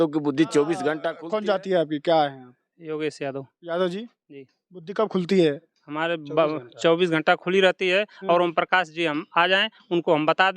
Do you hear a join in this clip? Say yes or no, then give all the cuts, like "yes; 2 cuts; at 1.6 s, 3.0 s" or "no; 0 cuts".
yes; 1 cut; at 1.1 s